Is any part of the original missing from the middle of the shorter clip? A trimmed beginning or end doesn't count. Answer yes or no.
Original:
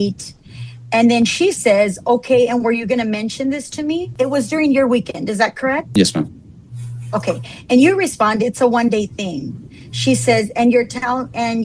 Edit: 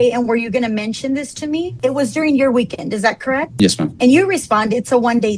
yes